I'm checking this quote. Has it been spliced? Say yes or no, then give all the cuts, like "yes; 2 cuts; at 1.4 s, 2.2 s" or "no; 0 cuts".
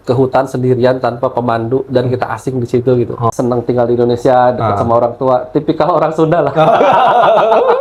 yes; 1 cut; at 3.3 s